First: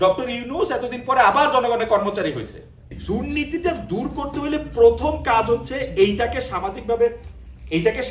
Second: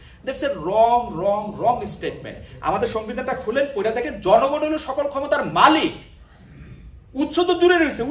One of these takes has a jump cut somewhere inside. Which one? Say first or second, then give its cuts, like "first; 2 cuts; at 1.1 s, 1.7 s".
first; 1 cut; at 2.9 s